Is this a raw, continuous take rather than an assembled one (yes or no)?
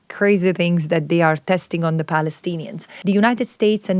no